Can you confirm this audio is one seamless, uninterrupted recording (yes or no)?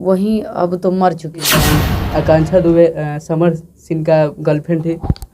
no